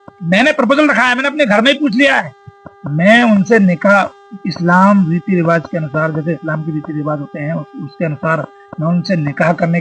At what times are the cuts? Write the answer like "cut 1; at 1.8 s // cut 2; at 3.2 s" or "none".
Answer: none